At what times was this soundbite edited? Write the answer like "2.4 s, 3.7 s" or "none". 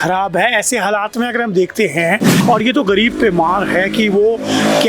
2.3 s